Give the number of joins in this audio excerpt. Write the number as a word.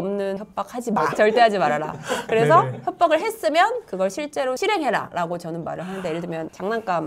one